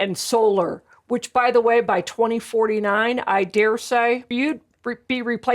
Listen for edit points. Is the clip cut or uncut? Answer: cut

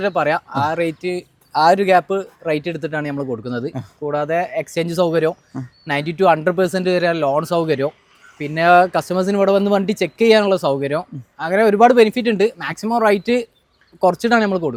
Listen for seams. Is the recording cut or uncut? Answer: uncut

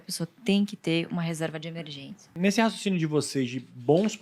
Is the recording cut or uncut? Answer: cut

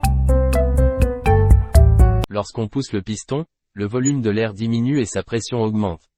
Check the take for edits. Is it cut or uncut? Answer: cut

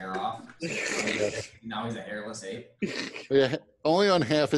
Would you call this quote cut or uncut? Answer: uncut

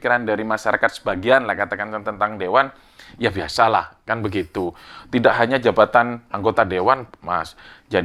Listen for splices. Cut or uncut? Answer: uncut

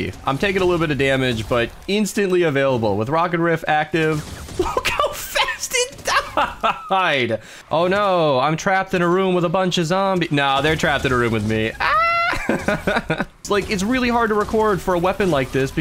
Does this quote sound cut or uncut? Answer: cut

